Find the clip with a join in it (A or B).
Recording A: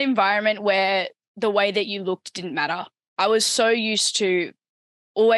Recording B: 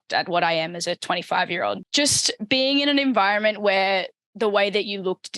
B